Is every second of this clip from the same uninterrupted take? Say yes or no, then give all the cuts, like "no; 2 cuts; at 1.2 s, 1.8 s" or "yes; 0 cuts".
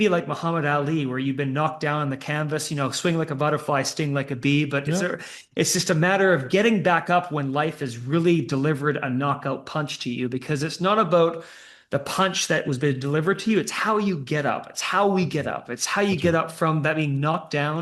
yes; 0 cuts